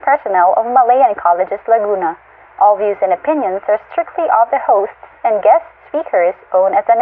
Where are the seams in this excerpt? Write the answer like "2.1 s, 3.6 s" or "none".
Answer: none